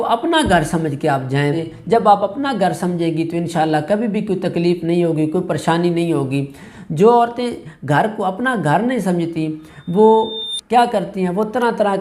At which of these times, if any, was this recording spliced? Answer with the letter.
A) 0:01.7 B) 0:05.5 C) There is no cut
A